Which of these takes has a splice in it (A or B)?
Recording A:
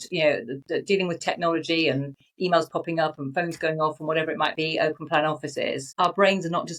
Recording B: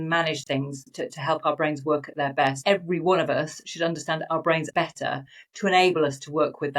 B